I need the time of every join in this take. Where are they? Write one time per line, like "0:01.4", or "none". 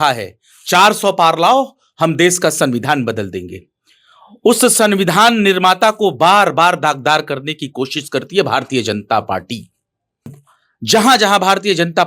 0:10.5